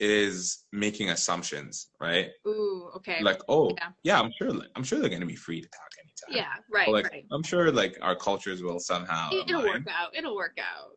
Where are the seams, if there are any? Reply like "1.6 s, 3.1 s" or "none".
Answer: none